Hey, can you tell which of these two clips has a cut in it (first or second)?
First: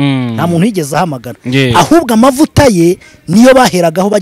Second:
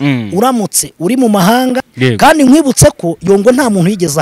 second